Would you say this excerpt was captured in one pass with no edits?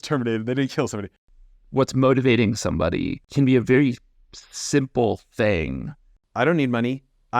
no; 3 cuts; at 1.1 s, 3.2 s, 6.2 s

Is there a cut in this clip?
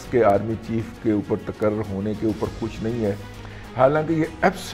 no; 0 cuts

